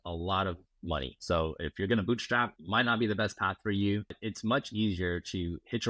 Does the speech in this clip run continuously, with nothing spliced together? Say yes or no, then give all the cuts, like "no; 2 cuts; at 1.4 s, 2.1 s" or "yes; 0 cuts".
no; 3 cuts; at 1.2 s, 2.6 s, 4.2 s